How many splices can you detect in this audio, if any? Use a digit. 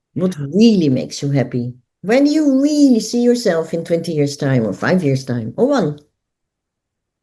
0